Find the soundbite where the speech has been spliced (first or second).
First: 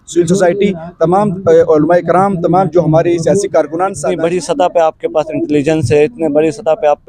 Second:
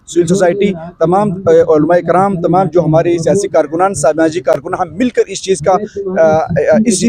first